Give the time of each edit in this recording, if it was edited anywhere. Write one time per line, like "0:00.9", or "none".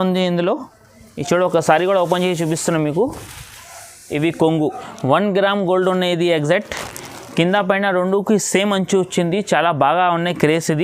0:04.9